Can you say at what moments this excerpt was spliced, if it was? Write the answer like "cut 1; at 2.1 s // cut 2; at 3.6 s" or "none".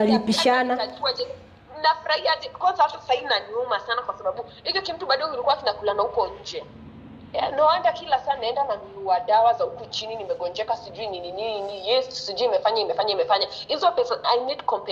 none